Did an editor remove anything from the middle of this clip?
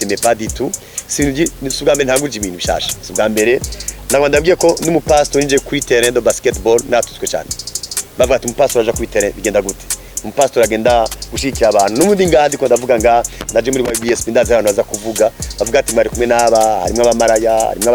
no; 0 cuts

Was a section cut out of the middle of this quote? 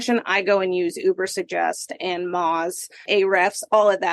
yes; 1 cut; at 3.0 s

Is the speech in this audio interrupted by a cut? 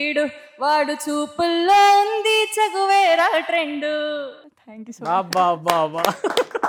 no; 0 cuts

